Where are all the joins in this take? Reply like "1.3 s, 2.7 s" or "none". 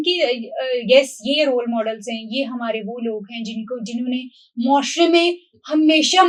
none